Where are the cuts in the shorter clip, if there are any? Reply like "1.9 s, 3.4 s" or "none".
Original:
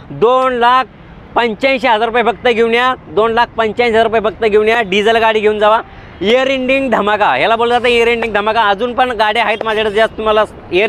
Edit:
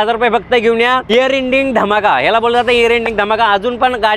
1.0 s